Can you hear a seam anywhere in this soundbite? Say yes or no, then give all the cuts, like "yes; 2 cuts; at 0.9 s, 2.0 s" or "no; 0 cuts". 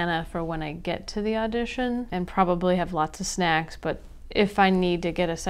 no; 0 cuts